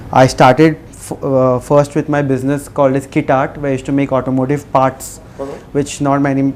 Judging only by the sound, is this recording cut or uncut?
uncut